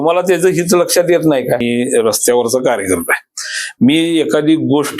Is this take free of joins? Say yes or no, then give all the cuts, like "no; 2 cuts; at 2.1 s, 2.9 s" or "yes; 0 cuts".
no; 1 cut; at 1.6 s